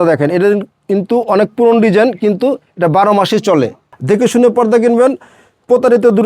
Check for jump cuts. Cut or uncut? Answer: cut